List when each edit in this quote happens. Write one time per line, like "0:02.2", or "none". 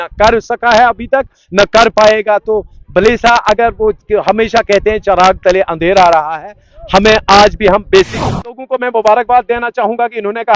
0:08.5